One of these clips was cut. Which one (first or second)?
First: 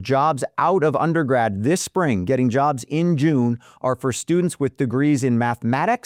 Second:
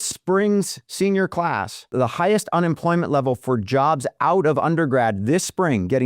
second